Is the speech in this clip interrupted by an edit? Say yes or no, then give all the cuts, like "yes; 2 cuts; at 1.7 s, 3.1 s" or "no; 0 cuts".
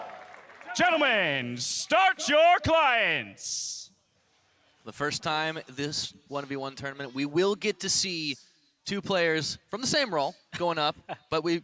no; 0 cuts